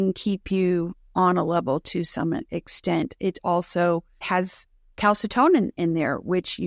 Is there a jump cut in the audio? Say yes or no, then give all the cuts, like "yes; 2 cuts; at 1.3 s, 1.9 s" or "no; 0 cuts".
yes; 2 cuts; at 1.0 s, 4.2 s